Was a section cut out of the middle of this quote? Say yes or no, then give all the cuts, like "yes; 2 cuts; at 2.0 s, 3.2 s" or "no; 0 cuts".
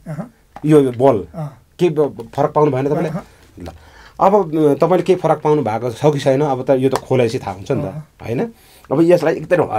no; 0 cuts